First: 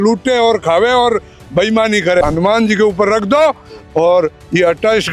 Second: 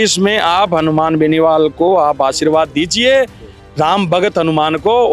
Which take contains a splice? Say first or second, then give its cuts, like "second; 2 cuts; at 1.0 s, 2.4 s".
first; 1 cut; at 2.2 s